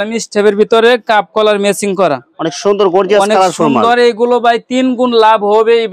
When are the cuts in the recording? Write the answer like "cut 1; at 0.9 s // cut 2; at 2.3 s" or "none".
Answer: none